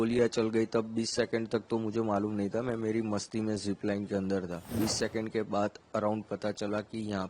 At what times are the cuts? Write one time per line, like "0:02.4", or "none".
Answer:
0:04.7